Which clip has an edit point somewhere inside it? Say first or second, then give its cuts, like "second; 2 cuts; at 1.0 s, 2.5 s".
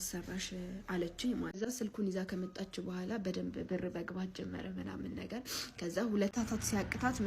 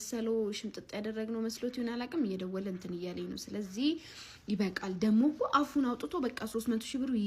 first; 2 cuts; at 1.6 s, 6.3 s